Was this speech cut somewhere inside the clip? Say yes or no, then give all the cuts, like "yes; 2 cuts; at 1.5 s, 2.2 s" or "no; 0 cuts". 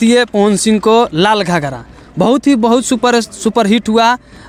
no; 0 cuts